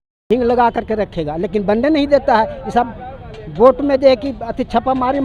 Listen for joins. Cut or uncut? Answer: uncut